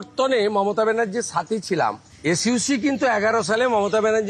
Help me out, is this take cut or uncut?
uncut